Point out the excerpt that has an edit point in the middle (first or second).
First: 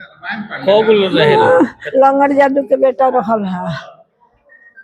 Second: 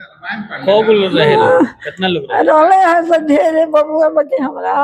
first